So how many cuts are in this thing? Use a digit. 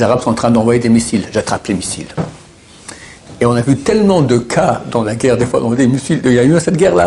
0